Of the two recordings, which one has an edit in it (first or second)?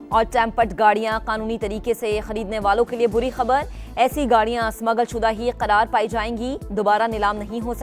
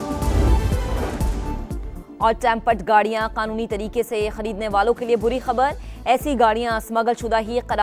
second